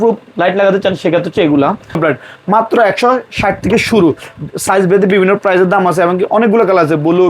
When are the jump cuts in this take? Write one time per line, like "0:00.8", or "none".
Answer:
0:02.0